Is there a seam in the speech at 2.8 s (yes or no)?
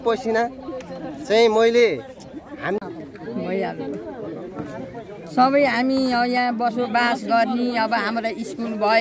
yes